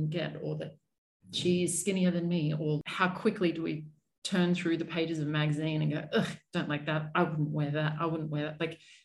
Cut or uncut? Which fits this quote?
cut